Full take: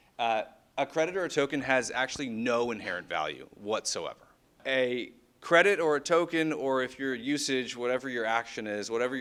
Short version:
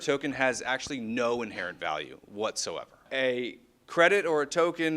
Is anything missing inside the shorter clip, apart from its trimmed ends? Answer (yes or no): yes